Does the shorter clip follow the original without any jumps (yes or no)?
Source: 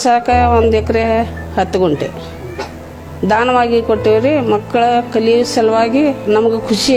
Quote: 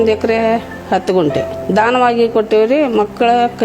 no